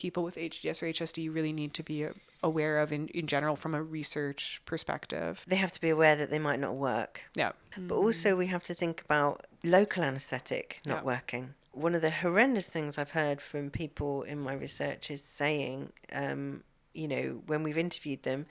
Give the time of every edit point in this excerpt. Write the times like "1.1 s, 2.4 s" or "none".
5.4 s, 7.7 s, 9.5 s, 11.6 s